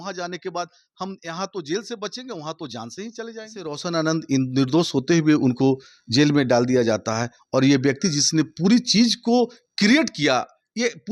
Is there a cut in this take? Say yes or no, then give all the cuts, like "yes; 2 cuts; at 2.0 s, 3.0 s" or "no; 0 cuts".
yes; 1 cut; at 3.8 s